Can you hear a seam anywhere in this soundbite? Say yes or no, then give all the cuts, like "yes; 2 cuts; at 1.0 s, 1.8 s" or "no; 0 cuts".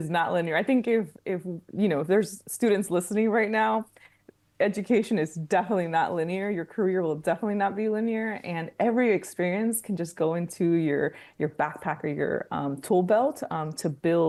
no; 0 cuts